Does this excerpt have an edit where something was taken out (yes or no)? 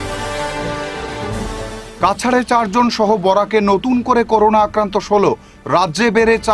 no